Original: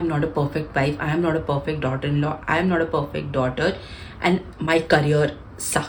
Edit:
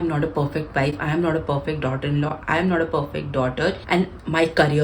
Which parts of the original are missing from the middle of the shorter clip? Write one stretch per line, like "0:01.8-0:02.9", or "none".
0:03.8-0:04.1